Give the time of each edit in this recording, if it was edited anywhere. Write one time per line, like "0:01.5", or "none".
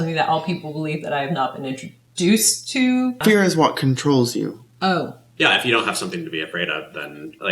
0:03.2
0:05.2